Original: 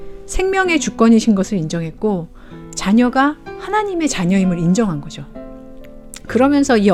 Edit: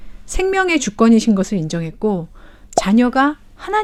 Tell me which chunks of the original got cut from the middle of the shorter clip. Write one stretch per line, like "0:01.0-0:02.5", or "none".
none